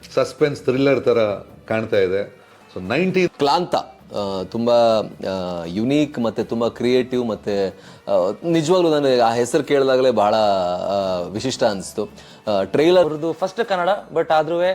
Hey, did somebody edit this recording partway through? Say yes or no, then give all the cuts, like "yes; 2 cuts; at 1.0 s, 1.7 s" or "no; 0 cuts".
yes; 2 cuts; at 3.3 s, 13.1 s